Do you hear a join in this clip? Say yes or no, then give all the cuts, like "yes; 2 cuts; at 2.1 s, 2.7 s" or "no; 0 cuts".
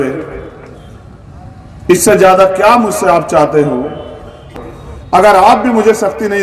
yes; 1 cut; at 4.5 s